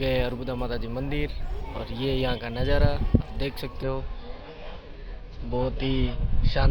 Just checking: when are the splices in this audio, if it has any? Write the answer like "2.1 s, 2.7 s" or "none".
none